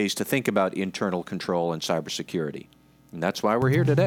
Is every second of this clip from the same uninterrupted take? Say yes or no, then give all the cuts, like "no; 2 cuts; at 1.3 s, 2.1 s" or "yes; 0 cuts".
yes; 0 cuts